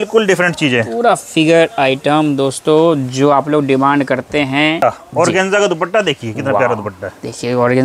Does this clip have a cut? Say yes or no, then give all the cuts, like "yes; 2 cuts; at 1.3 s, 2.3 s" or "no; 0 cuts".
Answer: yes; 1 cut; at 4.8 s